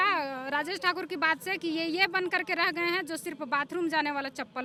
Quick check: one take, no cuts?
yes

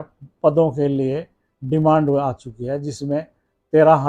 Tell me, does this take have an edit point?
no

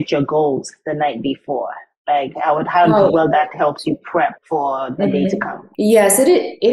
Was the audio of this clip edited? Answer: yes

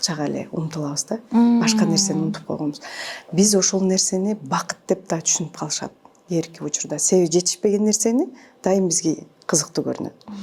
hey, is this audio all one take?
yes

